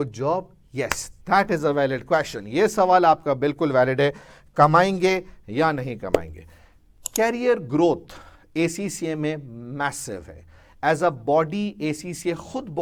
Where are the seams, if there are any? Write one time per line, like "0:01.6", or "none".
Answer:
none